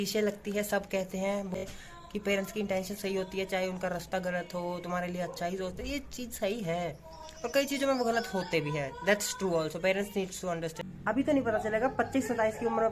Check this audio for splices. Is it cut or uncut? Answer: cut